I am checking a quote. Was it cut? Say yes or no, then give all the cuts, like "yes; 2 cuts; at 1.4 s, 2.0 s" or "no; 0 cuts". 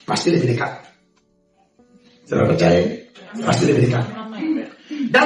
no; 0 cuts